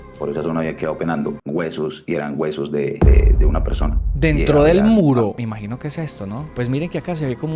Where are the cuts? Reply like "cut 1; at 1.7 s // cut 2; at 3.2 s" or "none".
cut 1; at 1.4 s // cut 2; at 5.3 s

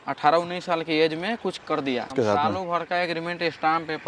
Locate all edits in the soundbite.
cut 1; at 2.1 s

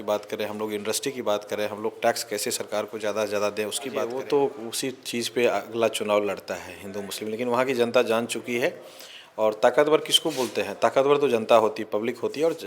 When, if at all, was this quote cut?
cut 1; at 4.1 s

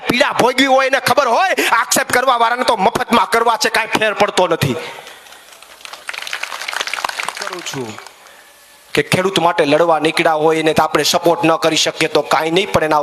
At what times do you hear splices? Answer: cut 1; at 7.5 s

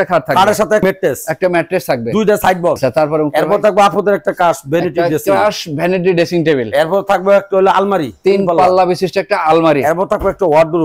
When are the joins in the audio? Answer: cut 1; at 0.8 s // cut 2; at 2.8 s

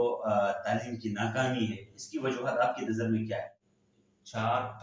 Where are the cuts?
cut 1; at 3.6 s

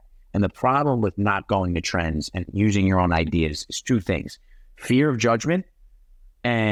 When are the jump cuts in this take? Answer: none

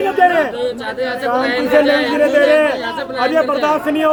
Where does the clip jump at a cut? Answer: none

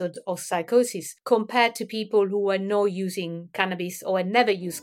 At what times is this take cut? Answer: cut 1; at 1.1 s

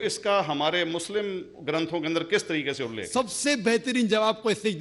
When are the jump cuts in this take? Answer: cut 1; at 3.0 s

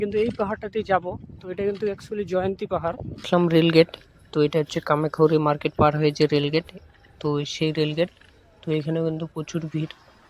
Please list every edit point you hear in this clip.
cut 1; at 3.2 s

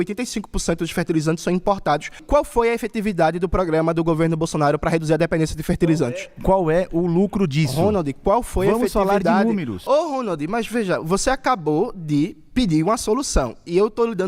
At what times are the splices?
cut 1; at 2.2 s // cut 2; at 5.0 s

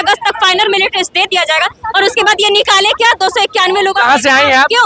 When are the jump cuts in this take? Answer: none

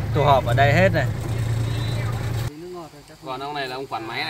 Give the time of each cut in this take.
cut 1; at 2.5 s

